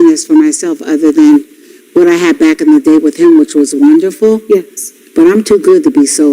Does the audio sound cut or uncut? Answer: cut